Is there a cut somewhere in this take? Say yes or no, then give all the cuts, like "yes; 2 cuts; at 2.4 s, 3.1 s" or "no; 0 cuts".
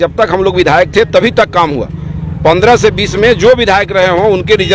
no; 0 cuts